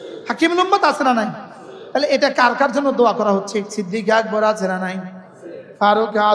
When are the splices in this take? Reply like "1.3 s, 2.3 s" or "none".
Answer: 3.7 s